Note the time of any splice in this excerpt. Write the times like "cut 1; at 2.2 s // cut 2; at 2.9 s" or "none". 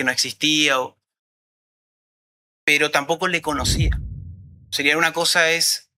none